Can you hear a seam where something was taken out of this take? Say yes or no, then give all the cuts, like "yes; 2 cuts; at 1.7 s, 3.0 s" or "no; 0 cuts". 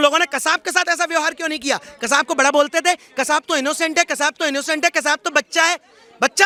no; 0 cuts